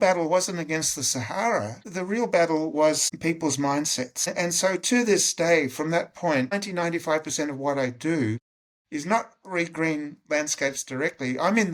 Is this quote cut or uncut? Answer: uncut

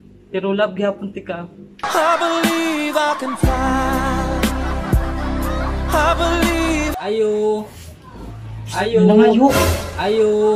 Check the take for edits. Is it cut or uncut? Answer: cut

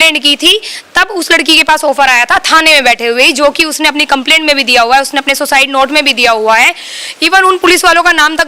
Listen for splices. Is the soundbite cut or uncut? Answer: uncut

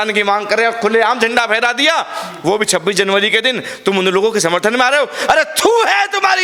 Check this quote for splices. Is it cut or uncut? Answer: uncut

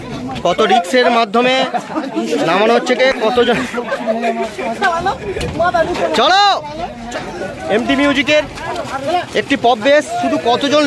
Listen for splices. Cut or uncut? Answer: cut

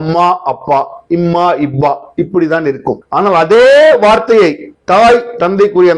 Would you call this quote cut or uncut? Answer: cut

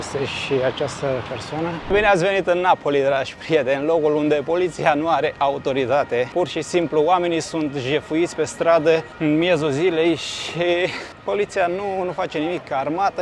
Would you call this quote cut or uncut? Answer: cut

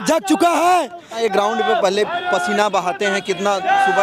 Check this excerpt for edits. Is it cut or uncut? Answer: cut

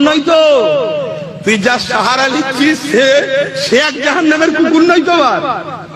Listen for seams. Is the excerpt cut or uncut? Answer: uncut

